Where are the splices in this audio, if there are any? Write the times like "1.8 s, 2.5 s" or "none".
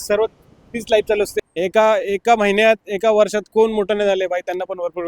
1.4 s